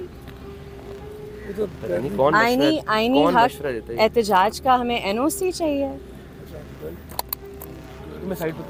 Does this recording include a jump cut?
no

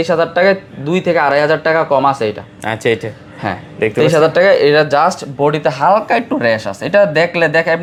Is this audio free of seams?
yes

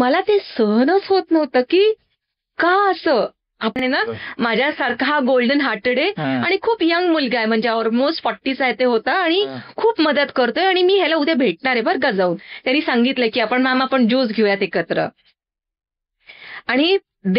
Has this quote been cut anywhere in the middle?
yes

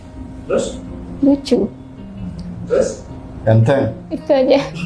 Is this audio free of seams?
yes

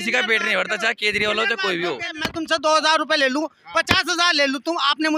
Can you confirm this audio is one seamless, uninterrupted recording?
no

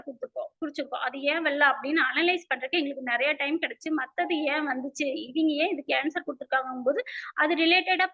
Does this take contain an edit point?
no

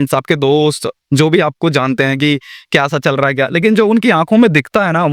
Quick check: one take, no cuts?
yes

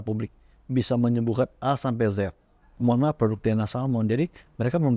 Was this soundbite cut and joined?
yes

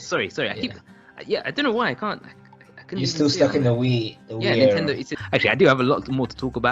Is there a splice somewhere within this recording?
yes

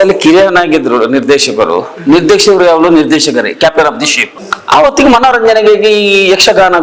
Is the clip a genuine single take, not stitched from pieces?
no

